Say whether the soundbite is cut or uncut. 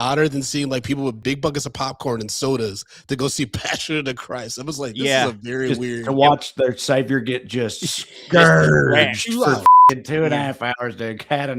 cut